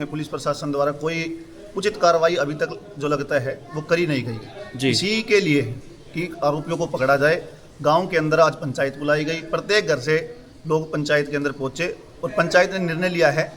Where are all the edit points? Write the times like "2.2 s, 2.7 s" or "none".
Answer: none